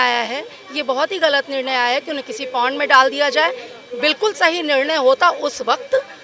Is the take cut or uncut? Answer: uncut